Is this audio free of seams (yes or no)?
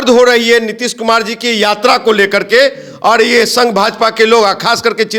yes